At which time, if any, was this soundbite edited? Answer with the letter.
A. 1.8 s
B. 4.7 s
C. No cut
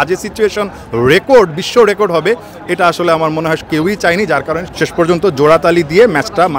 B